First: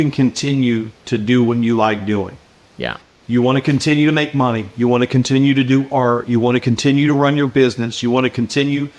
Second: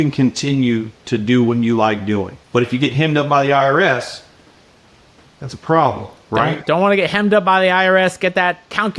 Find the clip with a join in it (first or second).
second